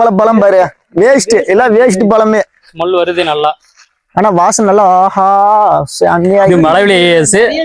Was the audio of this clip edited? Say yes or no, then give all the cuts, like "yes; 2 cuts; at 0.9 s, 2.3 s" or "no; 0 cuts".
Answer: yes; 1 cut; at 6.5 s